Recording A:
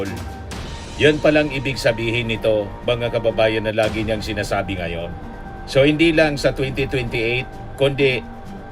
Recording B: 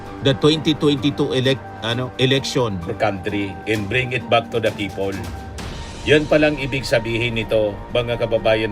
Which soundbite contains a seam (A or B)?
B